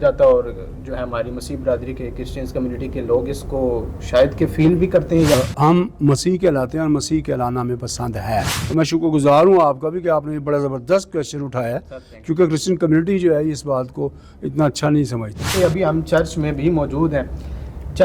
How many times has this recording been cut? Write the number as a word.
three